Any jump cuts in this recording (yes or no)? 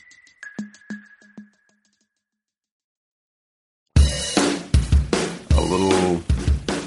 no